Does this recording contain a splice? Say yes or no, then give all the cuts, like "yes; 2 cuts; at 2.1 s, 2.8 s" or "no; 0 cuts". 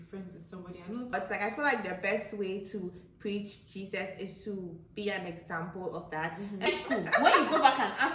yes; 2 cuts; at 1.1 s, 6.7 s